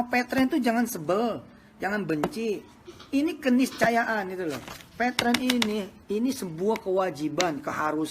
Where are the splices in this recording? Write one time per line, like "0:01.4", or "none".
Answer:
none